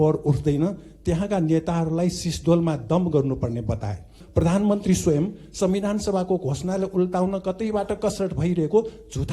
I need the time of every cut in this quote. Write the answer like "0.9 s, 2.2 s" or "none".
4.2 s